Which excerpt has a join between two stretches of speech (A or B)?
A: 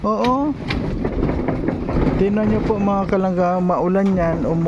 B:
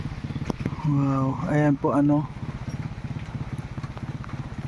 A